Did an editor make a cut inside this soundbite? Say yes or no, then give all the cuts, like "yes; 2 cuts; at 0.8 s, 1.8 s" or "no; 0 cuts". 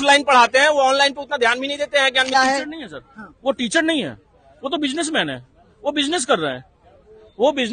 yes; 1 cut; at 2.3 s